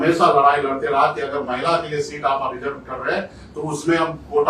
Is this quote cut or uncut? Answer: uncut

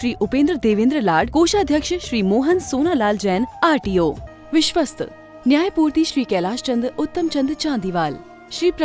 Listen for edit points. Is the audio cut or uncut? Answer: cut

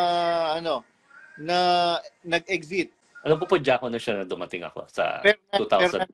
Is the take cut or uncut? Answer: cut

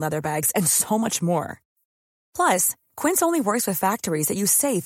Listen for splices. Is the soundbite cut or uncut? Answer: uncut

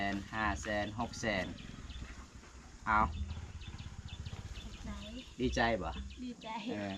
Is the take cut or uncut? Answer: uncut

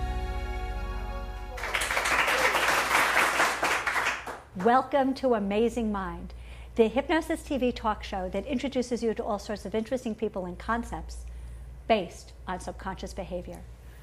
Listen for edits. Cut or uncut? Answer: cut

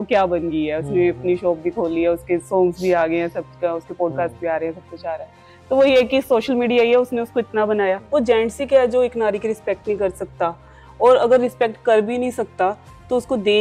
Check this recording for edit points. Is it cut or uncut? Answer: cut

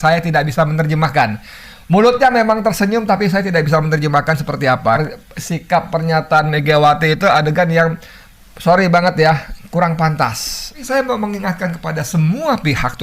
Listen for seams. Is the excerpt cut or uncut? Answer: cut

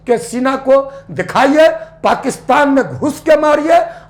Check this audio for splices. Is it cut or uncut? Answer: uncut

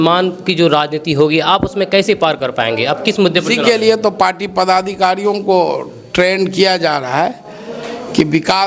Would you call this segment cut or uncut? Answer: uncut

